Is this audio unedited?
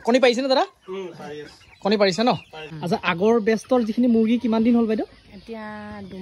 no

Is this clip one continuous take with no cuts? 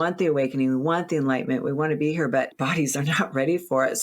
no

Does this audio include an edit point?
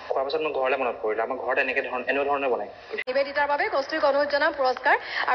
yes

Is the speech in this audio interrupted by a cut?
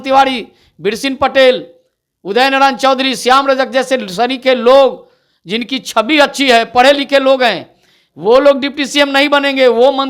no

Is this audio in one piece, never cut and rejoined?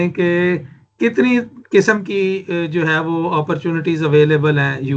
yes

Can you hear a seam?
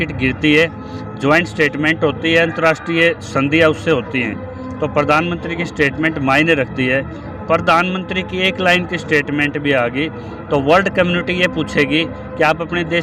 no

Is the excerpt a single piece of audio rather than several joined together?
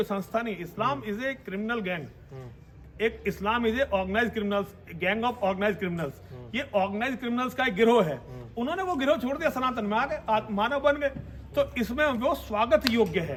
yes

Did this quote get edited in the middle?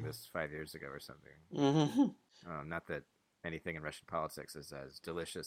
yes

